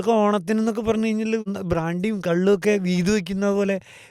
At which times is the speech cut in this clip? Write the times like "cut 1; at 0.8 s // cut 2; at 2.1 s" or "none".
cut 1; at 1.4 s